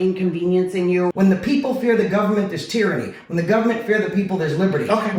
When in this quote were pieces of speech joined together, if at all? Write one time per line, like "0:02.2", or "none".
0:01.1